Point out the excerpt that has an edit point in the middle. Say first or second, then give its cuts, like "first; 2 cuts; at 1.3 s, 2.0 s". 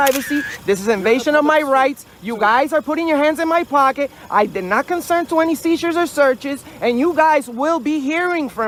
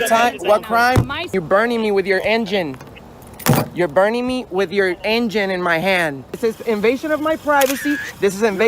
second; 2 cuts; at 1.3 s, 6.4 s